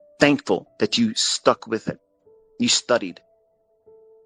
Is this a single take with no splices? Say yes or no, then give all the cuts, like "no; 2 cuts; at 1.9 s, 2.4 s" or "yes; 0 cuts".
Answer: yes; 0 cuts